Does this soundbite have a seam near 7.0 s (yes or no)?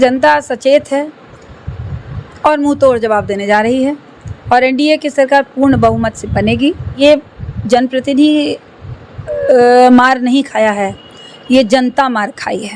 yes